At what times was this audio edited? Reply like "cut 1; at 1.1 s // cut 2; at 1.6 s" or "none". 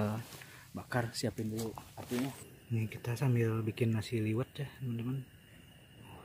cut 1; at 2.5 s